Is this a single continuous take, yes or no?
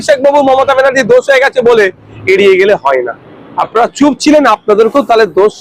yes